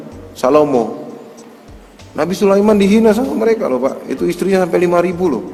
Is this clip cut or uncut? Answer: uncut